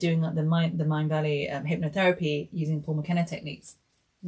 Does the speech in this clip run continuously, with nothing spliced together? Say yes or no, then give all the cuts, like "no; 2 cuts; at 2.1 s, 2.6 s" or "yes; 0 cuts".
yes; 0 cuts